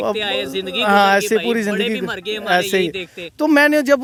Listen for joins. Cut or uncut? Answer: uncut